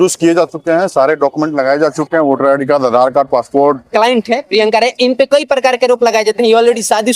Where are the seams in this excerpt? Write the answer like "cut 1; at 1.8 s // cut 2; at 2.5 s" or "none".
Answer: cut 1; at 3.9 s